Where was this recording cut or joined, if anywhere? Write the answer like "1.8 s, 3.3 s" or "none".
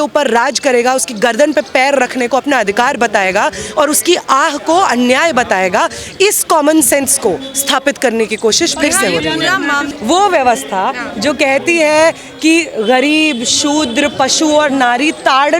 9.9 s